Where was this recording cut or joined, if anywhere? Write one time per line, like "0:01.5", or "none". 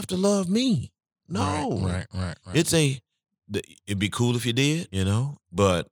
0:01.2
0:04.9